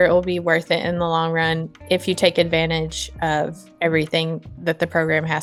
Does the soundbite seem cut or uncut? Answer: uncut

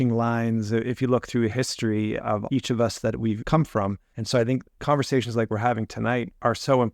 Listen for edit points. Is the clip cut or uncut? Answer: cut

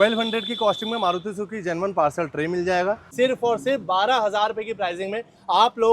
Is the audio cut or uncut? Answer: cut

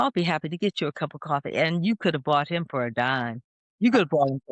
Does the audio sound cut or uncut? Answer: uncut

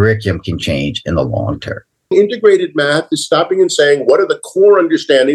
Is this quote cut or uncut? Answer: cut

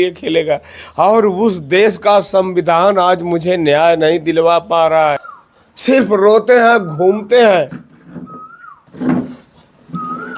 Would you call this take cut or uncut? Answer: cut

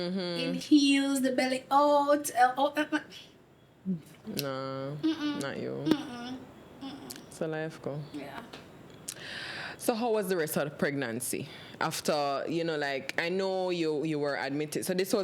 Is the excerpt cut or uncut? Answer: uncut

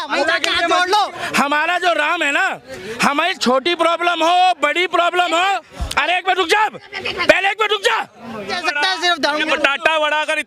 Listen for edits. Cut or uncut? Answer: cut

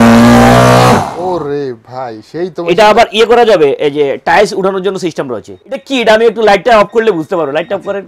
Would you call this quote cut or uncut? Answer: cut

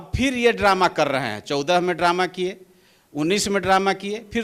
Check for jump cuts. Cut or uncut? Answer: uncut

